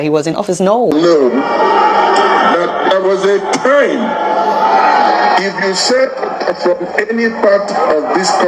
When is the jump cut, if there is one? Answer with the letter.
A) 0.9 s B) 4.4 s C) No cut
A